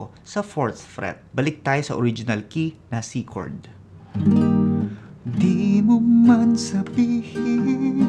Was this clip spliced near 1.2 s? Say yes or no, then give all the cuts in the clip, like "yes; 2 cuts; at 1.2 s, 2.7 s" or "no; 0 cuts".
yes; 1 cut; at 1.2 s